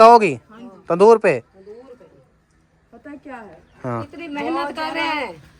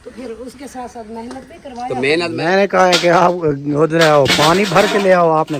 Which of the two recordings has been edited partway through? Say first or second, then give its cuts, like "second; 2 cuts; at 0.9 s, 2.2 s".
second; 1 cut; at 2.3 s